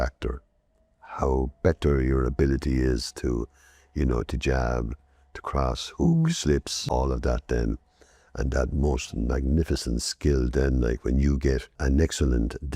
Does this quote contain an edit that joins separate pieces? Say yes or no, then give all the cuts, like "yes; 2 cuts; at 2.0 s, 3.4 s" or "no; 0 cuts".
yes; 2 cuts; at 6.8 s, 11.7 s